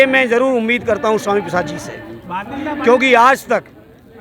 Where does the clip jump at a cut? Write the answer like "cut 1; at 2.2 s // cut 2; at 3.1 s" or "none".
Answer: none

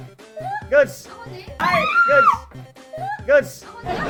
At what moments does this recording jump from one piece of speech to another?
none

